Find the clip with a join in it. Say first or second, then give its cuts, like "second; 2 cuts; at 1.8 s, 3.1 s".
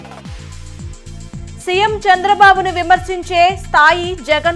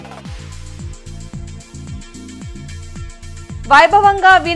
first; 1 cut; at 1.0 s